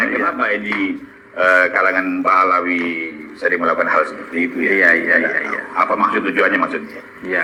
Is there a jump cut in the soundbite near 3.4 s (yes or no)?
no